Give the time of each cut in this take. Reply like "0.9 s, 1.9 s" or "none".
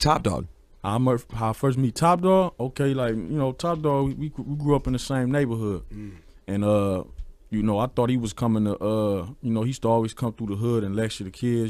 1.1 s